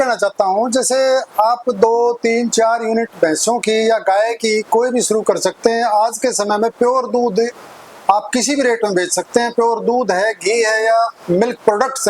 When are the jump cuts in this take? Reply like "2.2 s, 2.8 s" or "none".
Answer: none